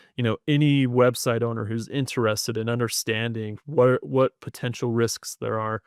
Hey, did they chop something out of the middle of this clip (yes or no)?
no